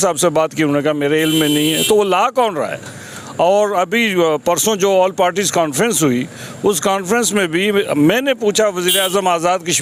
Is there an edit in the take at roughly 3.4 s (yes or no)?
no